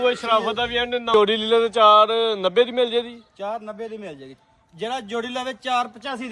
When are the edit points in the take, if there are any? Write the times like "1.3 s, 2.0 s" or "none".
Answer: 1.1 s